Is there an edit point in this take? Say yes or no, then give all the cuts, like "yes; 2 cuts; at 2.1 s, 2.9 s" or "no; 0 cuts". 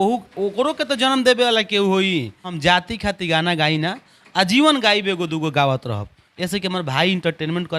yes; 1 cut; at 2.5 s